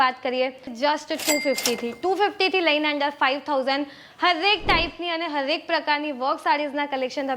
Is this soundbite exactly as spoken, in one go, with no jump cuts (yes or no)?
no